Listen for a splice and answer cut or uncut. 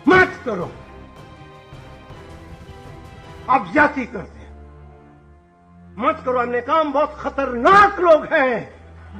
cut